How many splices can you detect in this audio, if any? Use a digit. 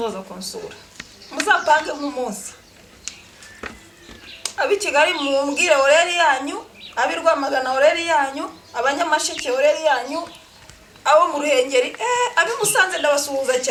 0